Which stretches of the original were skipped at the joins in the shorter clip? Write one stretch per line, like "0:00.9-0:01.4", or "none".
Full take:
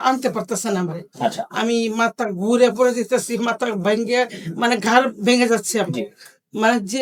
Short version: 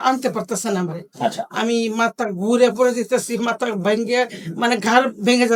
none